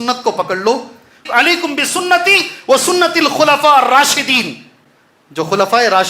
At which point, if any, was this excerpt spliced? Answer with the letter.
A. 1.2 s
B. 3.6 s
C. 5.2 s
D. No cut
A